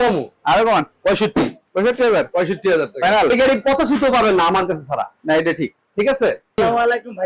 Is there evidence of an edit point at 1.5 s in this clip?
no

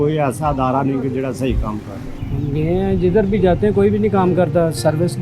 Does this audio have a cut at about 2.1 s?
yes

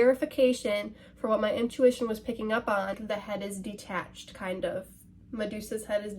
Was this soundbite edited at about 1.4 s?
no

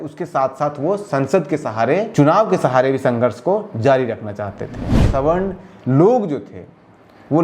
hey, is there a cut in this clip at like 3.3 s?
no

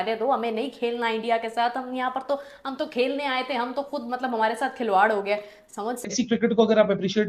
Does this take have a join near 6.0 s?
yes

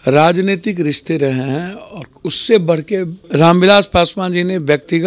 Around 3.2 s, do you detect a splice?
yes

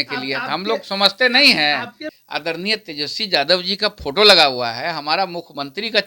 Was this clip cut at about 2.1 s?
yes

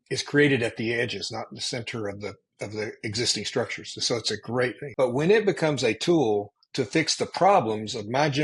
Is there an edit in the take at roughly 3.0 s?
no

